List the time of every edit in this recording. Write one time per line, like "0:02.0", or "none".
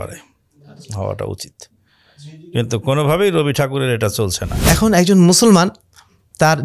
0:04.5